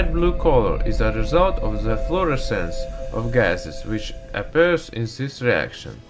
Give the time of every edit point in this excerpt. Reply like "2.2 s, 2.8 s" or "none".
none